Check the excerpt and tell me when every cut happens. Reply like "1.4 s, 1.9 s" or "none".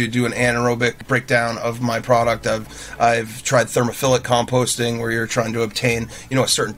1.0 s

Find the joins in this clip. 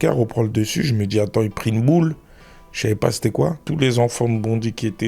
3.6 s

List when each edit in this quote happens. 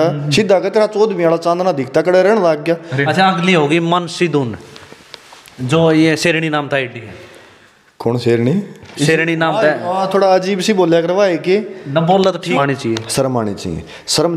3.0 s, 12.6 s

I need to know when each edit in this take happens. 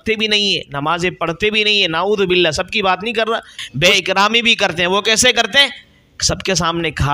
3.6 s

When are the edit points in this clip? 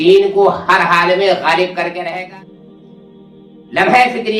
2.1 s

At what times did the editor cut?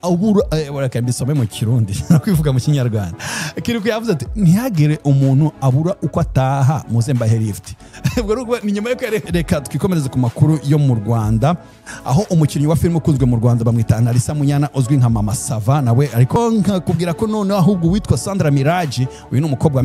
9.3 s, 16.4 s

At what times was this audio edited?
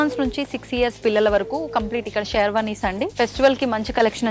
3.1 s

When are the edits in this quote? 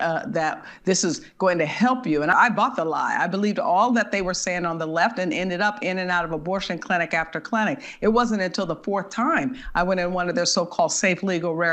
2.3 s

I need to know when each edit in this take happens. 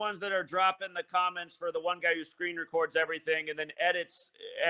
3.6 s

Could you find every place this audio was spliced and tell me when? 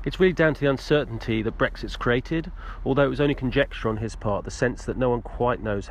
none

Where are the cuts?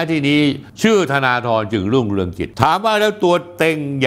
2.4 s

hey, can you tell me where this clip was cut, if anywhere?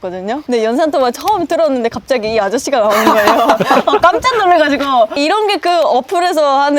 none

